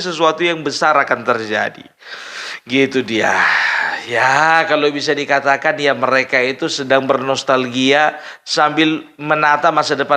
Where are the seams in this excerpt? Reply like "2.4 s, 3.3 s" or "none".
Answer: none

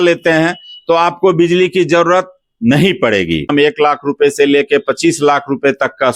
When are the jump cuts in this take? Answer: 3.5 s

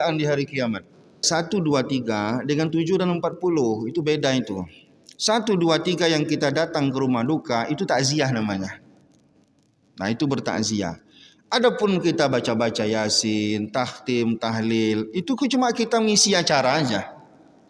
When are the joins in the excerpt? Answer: 1.2 s

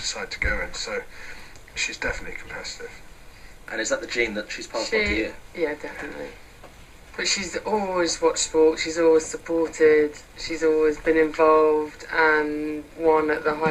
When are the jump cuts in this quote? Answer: none

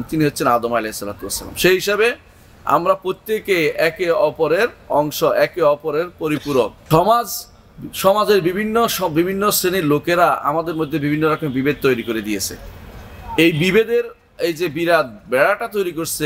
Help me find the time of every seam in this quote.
6.8 s

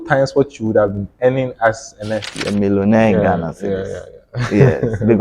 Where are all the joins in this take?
2.4 s

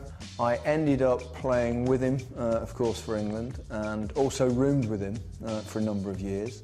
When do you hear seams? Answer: 5.3 s

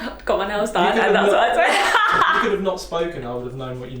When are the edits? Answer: none

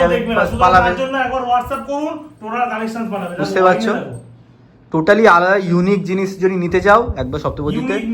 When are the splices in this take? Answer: none

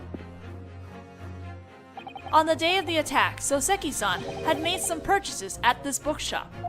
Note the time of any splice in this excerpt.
2.0 s

